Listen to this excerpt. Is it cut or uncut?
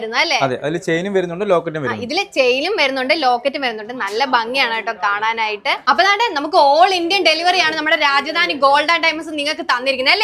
cut